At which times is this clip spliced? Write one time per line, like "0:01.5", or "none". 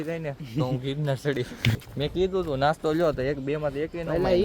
0:01.8